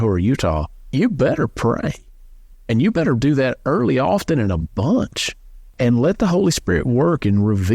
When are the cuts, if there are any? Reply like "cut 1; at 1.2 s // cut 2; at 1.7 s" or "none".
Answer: cut 1; at 0.9 s // cut 2; at 5.7 s